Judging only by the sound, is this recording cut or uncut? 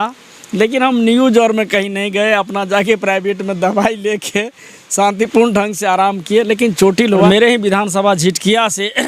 cut